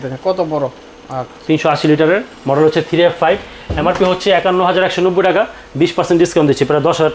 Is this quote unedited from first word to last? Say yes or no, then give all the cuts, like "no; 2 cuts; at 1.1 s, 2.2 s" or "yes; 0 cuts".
yes; 0 cuts